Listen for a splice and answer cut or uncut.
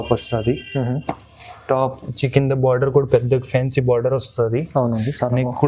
uncut